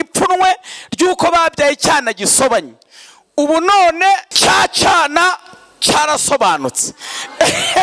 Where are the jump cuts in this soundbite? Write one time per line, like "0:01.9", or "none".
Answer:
0:04.3